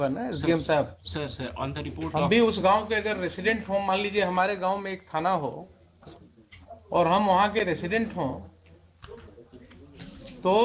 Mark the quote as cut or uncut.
uncut